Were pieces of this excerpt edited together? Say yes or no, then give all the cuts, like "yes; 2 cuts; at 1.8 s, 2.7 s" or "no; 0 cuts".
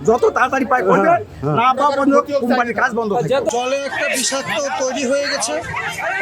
yes; 1 cut; at 3.5 s